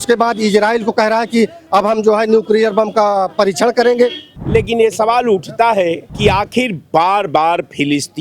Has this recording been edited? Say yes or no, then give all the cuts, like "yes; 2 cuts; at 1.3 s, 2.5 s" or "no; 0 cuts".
yes; 2 cuts; at 4.2 s, 6.1 s